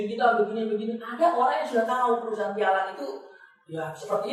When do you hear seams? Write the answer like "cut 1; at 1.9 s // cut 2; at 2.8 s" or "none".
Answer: none